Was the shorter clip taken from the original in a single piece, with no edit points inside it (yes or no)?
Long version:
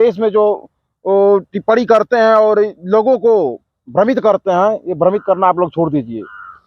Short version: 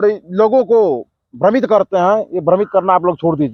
yes